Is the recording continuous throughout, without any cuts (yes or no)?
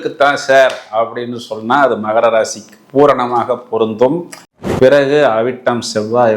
no